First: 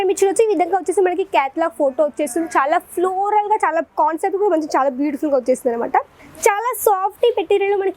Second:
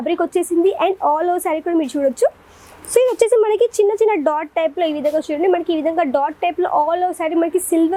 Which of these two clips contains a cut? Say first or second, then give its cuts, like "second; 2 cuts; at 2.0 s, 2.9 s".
first; 1 cut; at 6.2 s